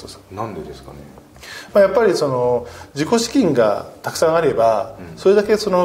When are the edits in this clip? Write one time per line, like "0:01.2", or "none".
none